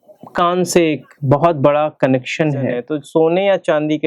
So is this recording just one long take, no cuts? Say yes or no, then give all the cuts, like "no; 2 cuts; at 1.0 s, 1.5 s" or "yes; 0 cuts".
no; 1 cut; at 2.9 s